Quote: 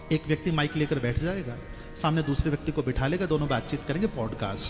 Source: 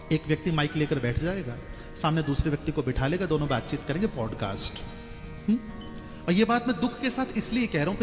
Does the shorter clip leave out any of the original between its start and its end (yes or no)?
no